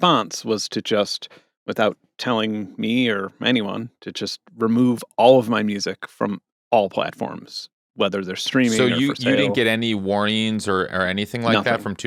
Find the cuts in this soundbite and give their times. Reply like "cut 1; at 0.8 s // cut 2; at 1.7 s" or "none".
none